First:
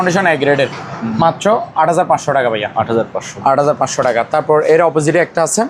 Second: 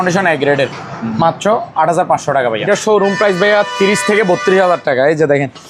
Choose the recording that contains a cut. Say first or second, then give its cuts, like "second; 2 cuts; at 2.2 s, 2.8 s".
second; 1 cut; at 2.7 s